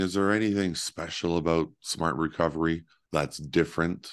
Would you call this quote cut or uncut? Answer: cut